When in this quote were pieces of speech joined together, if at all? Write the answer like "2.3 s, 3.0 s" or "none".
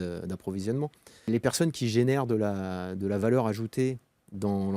1.3 s